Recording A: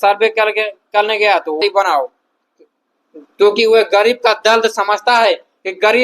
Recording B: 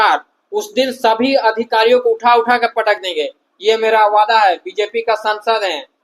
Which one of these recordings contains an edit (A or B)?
A